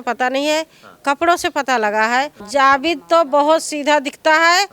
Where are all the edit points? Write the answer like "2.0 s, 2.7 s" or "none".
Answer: 2.4 s